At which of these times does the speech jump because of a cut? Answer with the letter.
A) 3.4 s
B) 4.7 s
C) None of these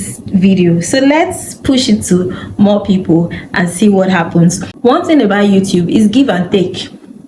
B